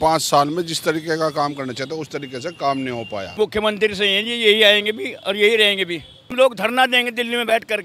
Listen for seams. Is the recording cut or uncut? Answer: cut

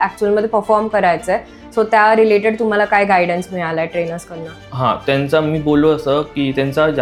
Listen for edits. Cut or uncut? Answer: uncut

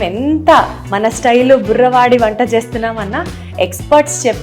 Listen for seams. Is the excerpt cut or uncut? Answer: uncut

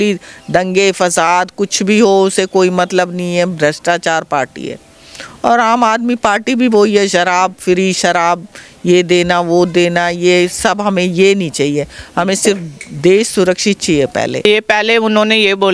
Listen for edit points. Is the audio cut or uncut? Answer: cut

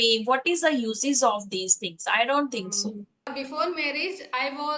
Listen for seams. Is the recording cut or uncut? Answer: cut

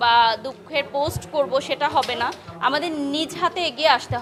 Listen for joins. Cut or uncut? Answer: uncut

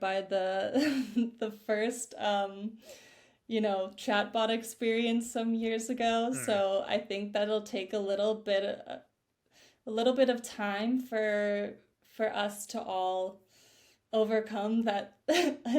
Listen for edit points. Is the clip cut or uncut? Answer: uncut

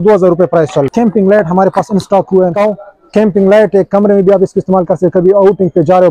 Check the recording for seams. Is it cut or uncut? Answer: cut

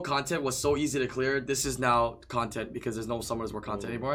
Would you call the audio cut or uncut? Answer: uncut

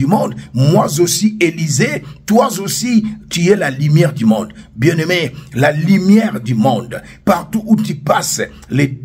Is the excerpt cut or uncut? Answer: uncut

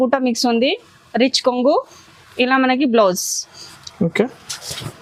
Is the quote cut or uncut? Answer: uncut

